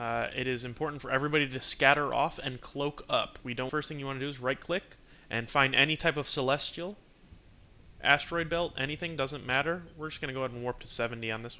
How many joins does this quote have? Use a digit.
1